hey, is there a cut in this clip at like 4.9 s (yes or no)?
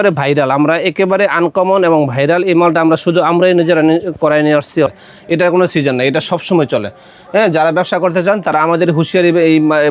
yes